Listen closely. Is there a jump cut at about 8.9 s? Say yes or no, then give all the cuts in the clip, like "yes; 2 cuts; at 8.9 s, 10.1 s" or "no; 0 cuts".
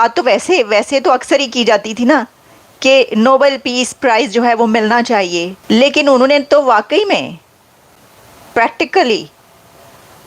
no; 1 cut; at 5.5 s